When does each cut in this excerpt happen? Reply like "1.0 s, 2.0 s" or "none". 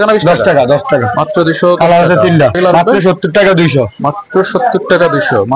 2.6 s